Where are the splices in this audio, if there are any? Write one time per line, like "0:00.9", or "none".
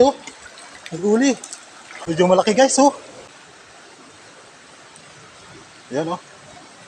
0:01.9
0:03.3

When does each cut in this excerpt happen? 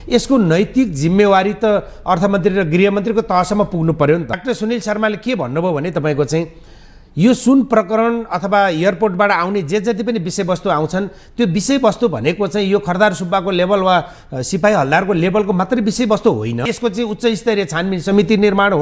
0:04.3
0:16.6

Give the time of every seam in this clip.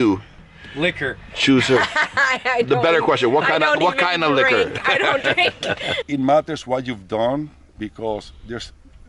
0:06.0

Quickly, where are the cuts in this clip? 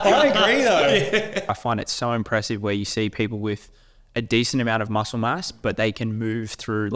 0:01.6

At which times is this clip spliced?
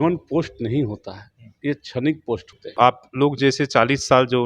0:02.8

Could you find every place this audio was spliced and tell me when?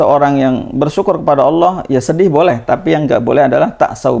none

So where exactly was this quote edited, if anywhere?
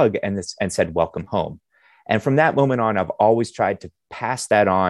none

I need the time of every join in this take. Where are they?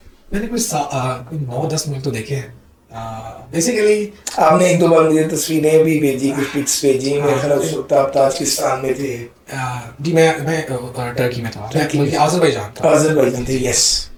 none

